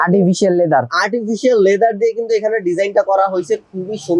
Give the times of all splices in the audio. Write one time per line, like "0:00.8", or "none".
none